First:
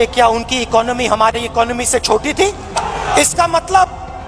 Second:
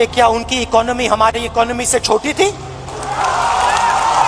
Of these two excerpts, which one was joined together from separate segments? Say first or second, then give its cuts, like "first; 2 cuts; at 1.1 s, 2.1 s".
first; 1 cut; at 2.9 s